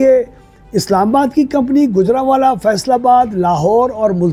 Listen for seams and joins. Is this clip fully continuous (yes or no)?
yes